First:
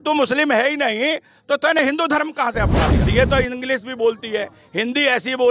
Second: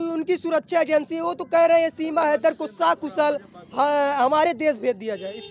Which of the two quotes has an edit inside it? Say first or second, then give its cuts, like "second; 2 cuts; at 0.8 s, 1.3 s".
first; 1 cut; at 3.1 s